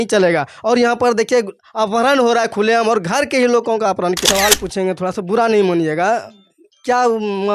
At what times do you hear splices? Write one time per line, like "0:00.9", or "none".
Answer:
0:04.2